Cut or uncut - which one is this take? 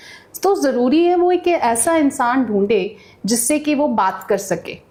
uncut